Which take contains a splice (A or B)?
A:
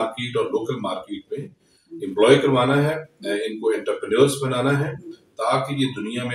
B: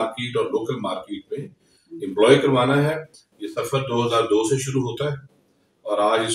B